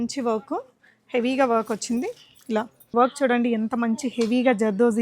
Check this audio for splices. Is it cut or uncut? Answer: cut